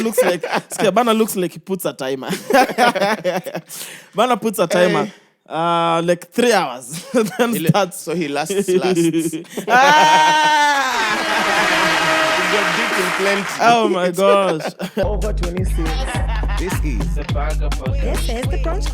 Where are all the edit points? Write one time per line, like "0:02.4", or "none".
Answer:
0:15.0